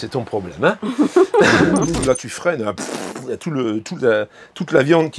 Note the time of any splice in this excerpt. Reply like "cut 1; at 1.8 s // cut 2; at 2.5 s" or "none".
cut 1; at 2.0 s